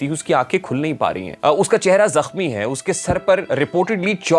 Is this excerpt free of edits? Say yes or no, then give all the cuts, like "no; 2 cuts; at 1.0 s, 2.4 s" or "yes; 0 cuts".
no; 2 cuts; at 1.3 s, 3.4 s